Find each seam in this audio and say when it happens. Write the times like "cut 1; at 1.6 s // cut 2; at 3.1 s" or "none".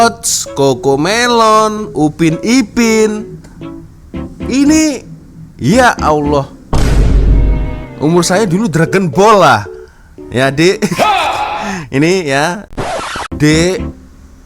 cut 1; at 12.8 s